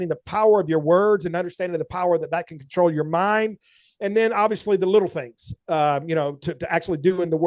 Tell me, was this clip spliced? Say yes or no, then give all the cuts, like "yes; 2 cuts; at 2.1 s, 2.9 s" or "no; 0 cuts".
no; 0 cuts